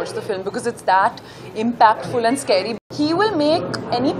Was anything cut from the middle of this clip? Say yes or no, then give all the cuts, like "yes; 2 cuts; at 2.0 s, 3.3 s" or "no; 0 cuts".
yes; 1 cut; at 2.7 s